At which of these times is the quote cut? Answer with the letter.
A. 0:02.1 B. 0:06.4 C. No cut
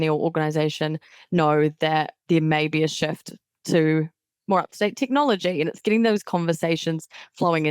A